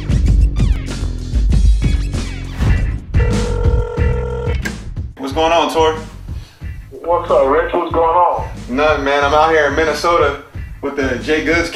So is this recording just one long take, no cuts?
yes; 0 cuts

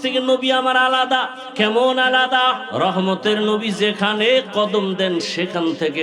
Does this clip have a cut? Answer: yes; 2 cuts; at 1.4 s, 2.6 s

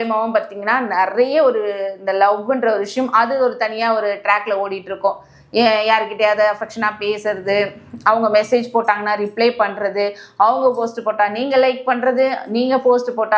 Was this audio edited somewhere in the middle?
no; 0 cuts

